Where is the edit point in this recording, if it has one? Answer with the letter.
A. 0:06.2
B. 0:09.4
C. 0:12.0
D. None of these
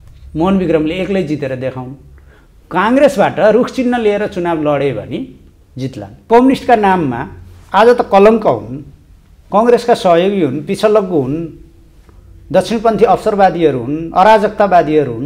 A